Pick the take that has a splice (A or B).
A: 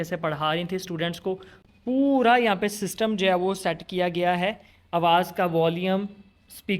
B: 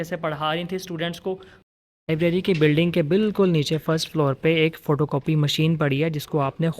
B